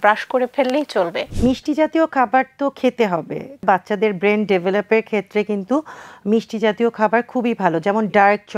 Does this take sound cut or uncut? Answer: cut